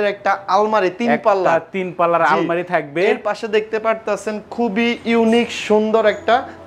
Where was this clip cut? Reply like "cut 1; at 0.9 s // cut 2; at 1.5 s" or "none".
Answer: none